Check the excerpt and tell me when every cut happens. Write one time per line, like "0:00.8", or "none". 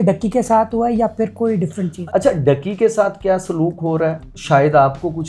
0:01.9
0:04.3